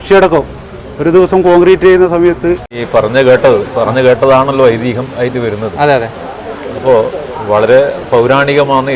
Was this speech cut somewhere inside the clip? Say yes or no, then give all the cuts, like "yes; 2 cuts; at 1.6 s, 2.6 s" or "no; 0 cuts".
yes; 1 cut; at 2.7 s